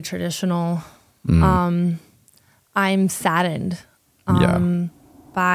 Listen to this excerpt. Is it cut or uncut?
uncut